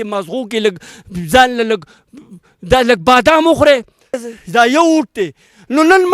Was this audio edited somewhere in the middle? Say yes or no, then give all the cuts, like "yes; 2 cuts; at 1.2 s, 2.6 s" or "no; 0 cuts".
yes; 1 cut; at 4.3 s